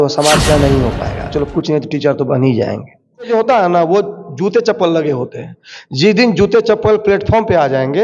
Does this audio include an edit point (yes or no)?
yes